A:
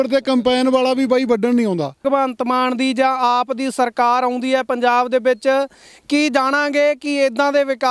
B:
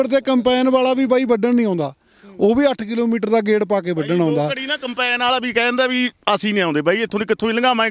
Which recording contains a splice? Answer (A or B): A